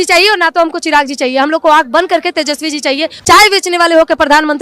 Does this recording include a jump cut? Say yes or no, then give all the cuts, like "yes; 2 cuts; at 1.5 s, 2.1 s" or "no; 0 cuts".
yes; 1 cut; at 3.1 s